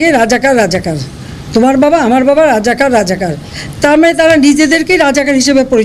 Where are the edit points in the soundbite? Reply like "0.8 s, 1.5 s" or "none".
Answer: none